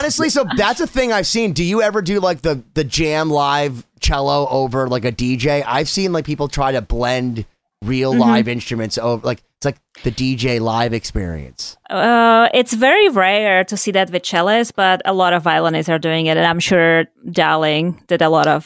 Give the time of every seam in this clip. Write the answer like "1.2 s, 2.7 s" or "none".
none